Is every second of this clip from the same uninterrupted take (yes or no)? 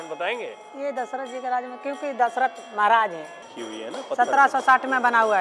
no